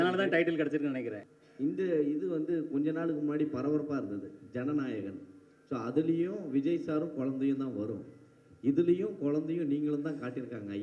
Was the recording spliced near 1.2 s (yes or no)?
yes